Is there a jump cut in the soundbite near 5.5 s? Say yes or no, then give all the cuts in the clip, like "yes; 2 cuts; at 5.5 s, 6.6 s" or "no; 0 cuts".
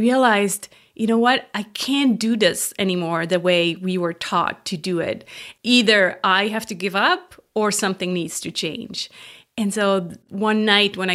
yes; 1 cut; at 5.5 s